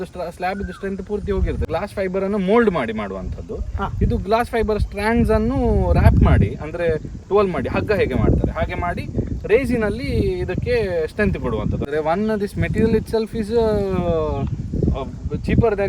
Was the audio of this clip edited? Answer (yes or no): yes